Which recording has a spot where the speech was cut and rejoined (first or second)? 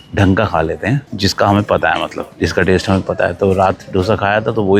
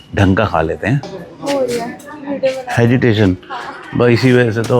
second